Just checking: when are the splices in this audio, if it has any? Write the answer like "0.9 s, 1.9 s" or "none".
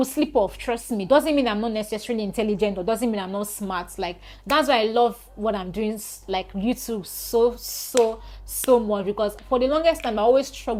none